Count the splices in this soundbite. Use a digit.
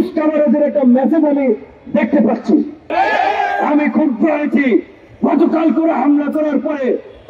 1